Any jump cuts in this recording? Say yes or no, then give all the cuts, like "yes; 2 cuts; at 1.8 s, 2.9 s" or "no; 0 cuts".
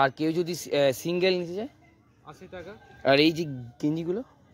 no; 0 cuts